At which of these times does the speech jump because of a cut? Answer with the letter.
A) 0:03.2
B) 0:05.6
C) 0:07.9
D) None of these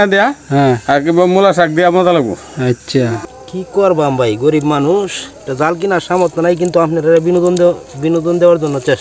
A